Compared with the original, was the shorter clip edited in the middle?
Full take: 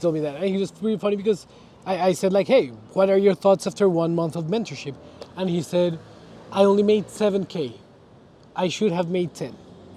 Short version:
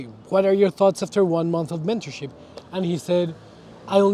no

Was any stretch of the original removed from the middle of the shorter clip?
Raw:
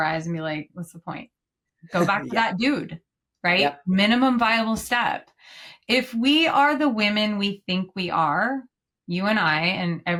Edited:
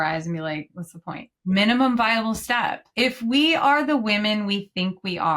yes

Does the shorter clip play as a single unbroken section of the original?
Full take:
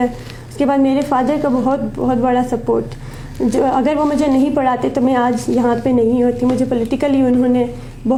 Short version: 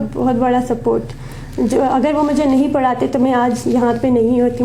yes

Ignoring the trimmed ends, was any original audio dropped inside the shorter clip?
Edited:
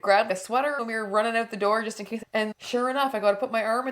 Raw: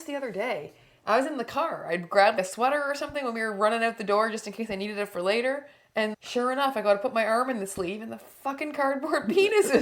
yes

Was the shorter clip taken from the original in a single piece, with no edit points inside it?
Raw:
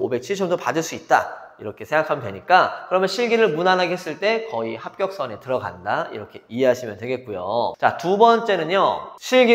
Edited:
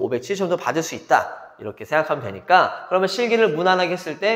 yes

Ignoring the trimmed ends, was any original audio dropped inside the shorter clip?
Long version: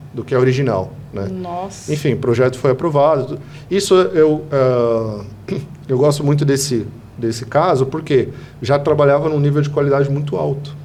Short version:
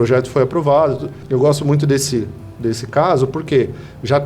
yes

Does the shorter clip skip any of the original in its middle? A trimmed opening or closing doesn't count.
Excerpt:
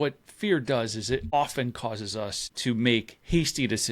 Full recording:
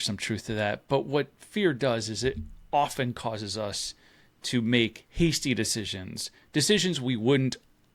yes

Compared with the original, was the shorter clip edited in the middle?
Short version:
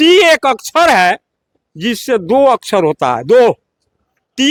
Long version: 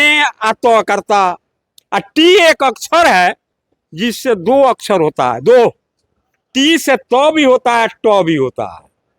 no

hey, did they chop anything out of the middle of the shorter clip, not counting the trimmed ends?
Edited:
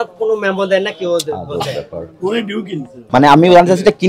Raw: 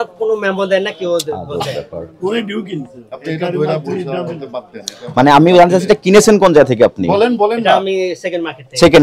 yes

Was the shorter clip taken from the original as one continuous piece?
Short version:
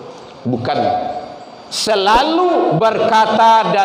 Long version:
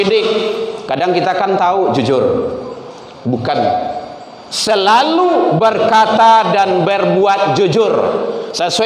yes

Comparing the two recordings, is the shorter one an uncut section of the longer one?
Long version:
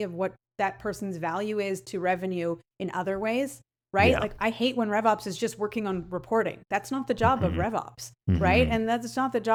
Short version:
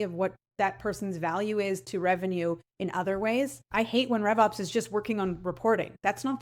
no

